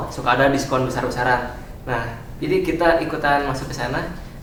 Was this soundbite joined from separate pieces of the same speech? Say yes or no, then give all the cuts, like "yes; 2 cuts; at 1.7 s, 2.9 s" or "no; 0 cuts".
no; 0 cuts